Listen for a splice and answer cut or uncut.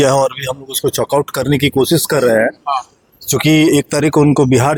uncut